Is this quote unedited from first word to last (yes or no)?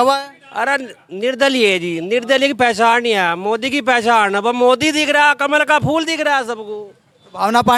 yes